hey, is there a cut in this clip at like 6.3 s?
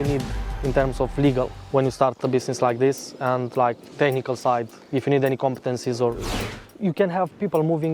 yes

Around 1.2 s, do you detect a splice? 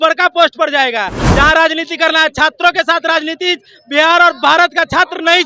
yes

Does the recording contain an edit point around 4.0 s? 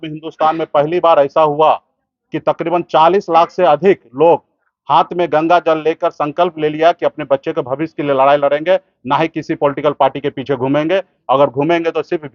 no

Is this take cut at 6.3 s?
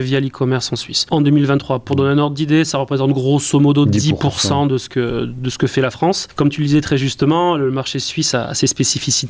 yes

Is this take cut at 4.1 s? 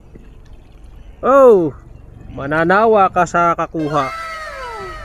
yes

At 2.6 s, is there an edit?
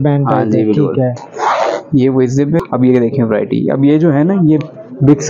yes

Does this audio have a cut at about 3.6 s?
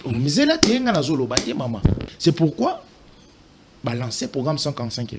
no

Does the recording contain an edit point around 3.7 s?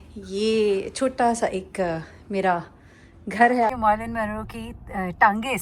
yes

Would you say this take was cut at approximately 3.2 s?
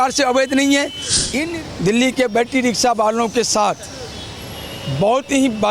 no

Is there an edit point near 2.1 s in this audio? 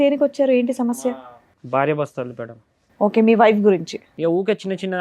no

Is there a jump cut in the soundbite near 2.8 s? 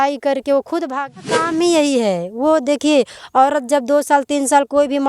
no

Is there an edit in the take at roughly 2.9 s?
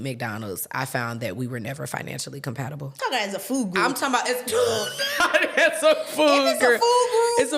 yes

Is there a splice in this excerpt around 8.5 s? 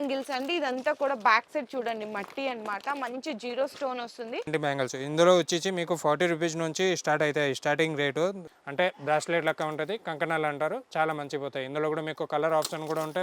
yes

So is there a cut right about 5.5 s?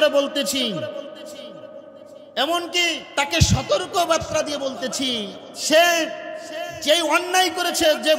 yes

